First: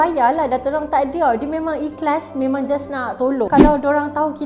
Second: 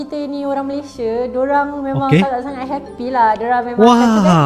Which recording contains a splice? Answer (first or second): first